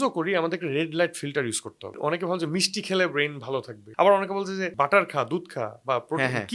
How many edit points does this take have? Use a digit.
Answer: 3